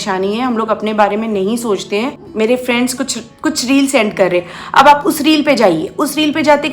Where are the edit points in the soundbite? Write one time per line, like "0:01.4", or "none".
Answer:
0:02.2